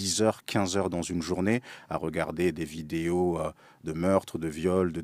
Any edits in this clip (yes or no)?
no